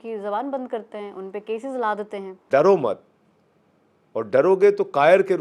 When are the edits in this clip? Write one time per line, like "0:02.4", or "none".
0:02.5